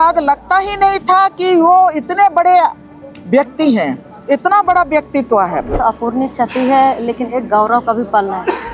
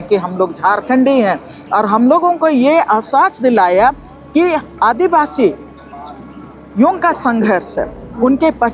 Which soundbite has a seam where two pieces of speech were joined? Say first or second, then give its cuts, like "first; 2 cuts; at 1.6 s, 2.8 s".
first; 1 cut; at 5.8 s